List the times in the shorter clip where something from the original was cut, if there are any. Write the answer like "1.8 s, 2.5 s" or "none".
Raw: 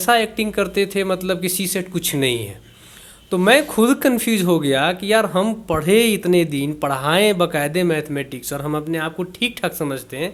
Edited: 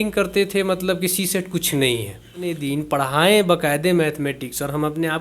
2.6 s

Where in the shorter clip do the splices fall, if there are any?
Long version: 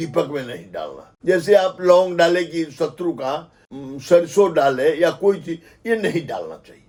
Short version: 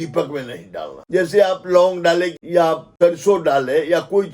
1.0 s, 2.5 s

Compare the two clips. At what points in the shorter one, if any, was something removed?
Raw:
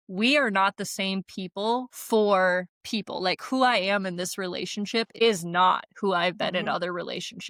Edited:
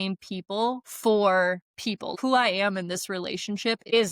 2.1 s

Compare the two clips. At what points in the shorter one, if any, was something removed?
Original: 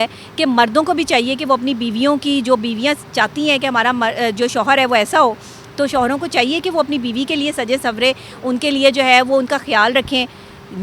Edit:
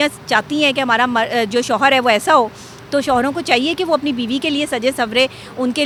none

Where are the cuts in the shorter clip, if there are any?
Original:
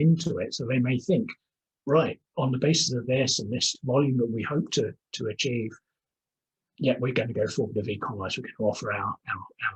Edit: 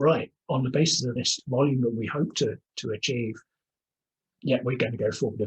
1.1 s

